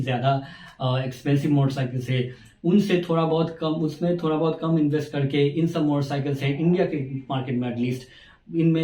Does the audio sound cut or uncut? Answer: uncut